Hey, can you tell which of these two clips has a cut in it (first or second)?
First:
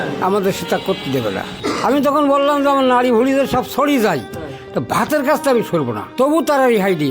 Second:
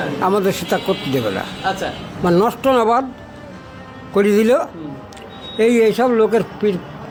first